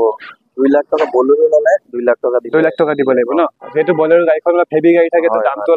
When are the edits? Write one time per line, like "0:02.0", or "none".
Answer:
none